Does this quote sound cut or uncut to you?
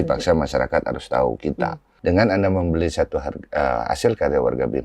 cut